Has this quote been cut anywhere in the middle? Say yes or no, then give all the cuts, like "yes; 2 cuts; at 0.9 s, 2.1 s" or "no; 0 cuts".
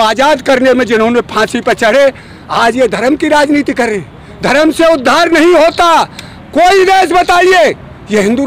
no; 0 cuts